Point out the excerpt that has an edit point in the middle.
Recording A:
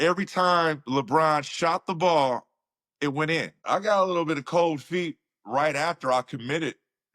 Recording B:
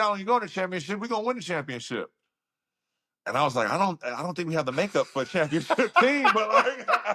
A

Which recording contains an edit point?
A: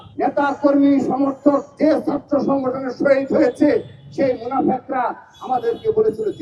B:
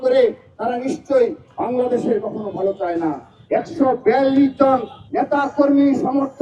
B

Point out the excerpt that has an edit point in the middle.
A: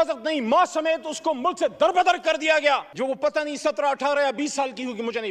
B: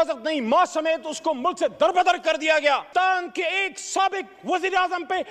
B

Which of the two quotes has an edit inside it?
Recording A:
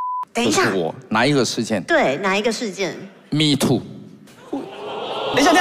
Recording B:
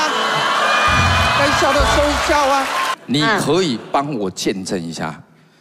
B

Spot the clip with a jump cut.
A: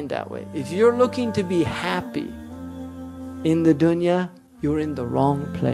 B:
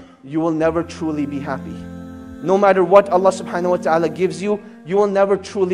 A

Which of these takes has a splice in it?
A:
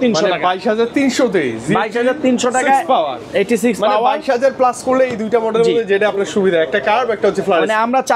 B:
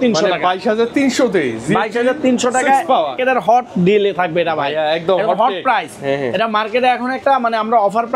B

